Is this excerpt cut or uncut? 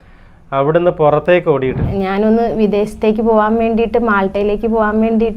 cut